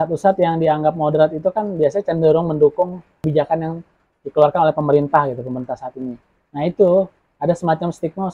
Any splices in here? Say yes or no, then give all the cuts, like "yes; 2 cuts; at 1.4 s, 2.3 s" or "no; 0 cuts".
yes; 1 cut; at 3.2 s